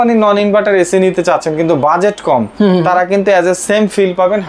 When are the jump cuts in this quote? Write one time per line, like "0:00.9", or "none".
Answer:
none